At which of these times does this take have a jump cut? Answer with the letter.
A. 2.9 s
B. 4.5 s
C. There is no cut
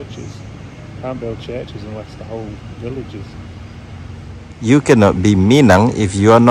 B